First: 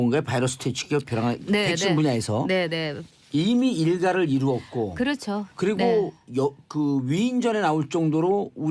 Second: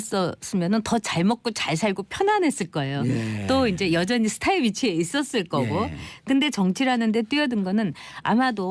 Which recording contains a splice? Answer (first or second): second